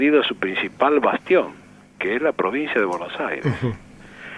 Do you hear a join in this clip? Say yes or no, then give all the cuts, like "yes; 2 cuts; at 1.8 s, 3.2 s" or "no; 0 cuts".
yes; 1 cut; at 3.0 s